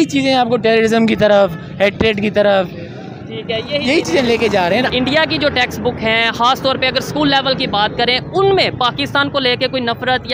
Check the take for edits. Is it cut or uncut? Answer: cut